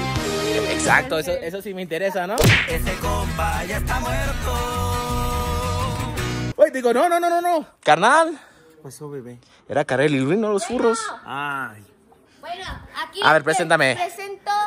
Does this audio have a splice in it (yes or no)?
no